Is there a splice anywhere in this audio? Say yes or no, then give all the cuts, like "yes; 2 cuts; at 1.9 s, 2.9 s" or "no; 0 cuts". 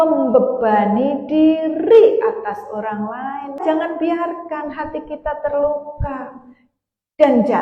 yes; 1 cut; at 3.6 s